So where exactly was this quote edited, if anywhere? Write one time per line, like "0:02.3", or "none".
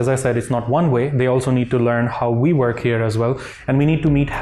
none